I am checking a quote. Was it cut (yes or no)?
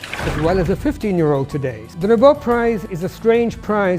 yes